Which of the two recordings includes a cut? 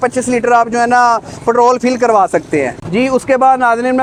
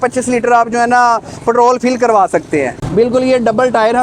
second; 1 cut; at 2.8 s

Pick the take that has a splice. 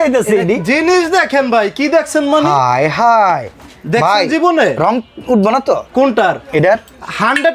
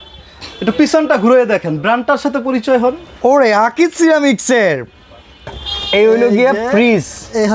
second; 1 cut; at 5.6 s

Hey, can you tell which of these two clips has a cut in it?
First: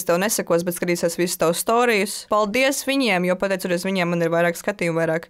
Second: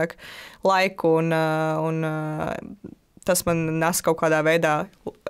first; 1 cut; at 2.2 s

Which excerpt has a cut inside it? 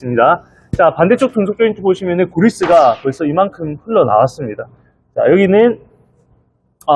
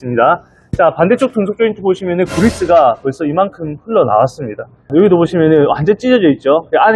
second; 1 cut; at 4.9 s

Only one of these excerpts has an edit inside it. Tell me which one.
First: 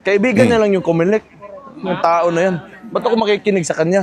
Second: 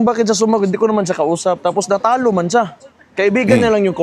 second; 1 cut; at 2.2 s

